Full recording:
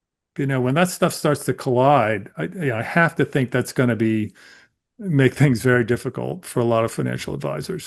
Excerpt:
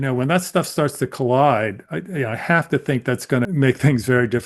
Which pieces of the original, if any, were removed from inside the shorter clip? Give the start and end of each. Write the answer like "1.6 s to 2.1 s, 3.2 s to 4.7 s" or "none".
3.9 s to 5.0 s